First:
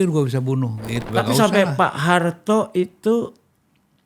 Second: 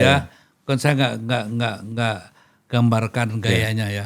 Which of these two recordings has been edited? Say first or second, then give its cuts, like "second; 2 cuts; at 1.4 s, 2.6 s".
first; 1 cut; at 1.0 s